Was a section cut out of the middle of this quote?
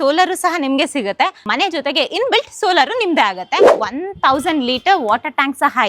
yes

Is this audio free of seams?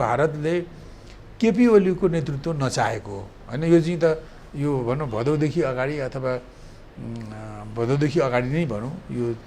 yes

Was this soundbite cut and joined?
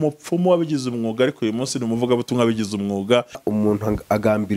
yes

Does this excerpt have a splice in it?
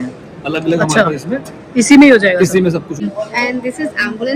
yes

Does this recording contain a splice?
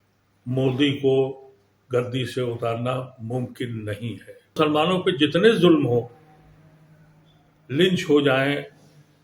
yes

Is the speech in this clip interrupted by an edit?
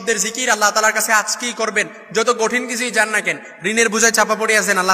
no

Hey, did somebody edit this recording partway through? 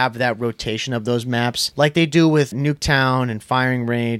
yes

